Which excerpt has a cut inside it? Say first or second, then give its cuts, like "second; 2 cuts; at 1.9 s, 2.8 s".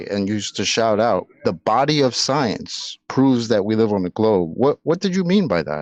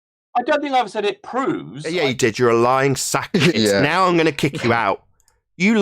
second; 2 cuts; at 1.8 s, 3.6 s